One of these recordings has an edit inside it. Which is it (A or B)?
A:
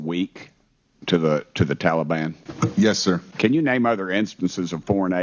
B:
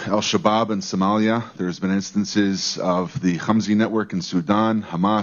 A